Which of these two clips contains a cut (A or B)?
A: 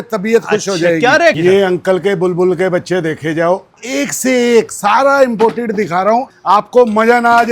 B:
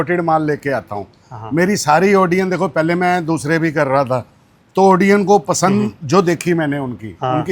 A